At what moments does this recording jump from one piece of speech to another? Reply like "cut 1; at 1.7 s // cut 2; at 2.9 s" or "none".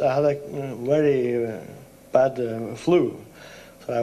cut 1; at 1.0 s